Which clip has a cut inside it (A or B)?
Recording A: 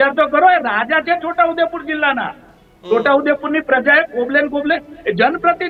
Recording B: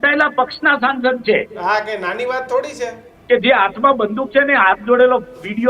B